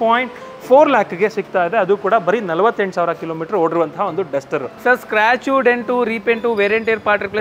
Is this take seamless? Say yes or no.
no